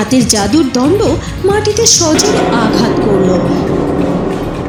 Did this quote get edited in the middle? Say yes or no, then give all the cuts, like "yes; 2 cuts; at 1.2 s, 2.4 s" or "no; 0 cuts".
no; 0 cuts